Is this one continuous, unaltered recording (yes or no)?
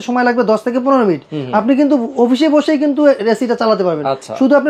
yes